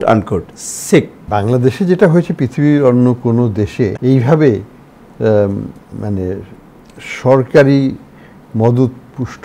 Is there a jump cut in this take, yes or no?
yes